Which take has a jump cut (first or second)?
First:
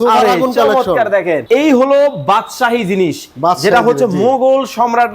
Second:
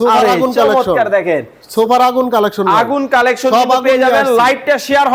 first